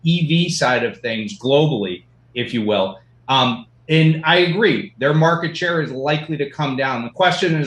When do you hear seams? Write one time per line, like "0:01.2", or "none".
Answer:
none